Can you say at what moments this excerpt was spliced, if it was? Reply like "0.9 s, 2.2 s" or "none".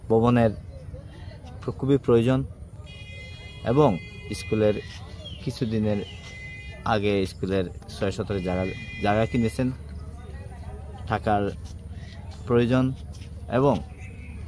none